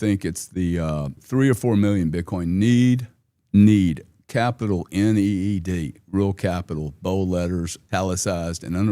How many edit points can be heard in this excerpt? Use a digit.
2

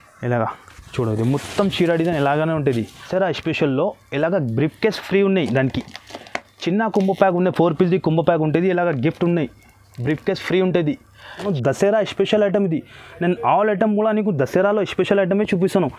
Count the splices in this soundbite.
2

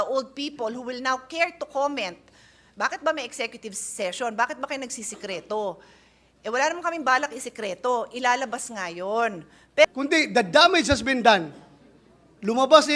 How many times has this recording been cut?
1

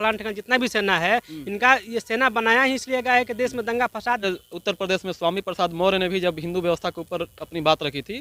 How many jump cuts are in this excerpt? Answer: 1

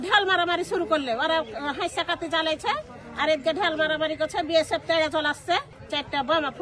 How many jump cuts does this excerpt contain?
1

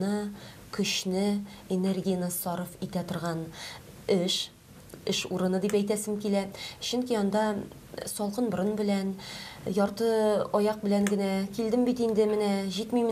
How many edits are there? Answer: 0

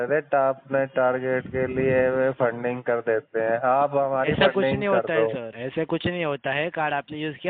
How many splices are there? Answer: 1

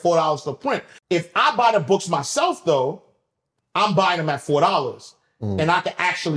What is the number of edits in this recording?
1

